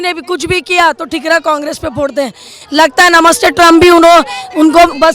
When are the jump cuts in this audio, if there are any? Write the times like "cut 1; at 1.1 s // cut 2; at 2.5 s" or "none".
none